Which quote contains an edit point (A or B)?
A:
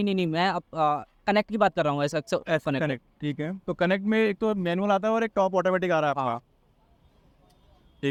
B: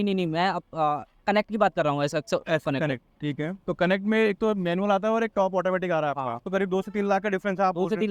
B